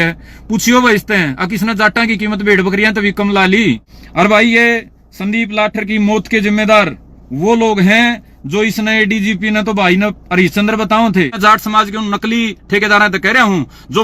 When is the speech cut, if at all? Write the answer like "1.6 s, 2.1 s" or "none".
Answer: 3.9 s, 11.3 s